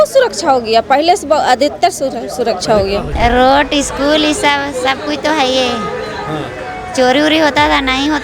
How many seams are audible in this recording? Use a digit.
1